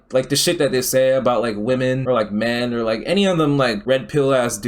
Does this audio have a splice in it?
yes; 1 cut; at 3.8 s

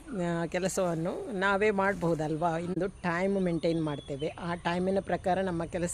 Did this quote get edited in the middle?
yes; 1 cut; at 2.7 s

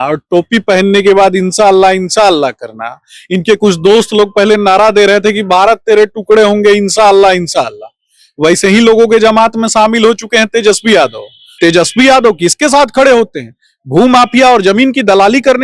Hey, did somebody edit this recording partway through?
yes; 1 cut; at 11.5 s

